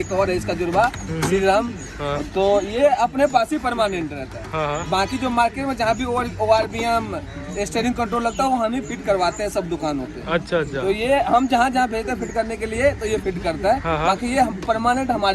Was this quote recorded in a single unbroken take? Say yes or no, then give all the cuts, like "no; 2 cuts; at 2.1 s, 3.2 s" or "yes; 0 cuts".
yes; 0 cuts